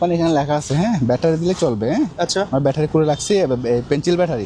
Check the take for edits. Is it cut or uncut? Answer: uncut